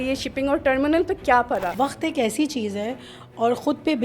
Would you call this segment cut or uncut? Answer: cut